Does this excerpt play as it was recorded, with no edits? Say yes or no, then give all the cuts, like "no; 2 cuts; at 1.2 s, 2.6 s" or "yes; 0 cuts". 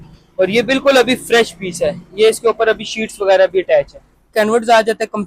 no; 1 cut; at 4.3 s